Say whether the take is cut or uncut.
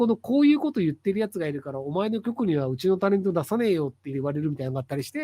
cut